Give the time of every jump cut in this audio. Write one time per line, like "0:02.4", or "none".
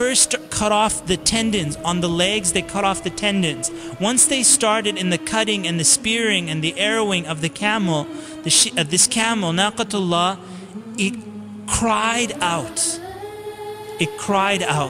none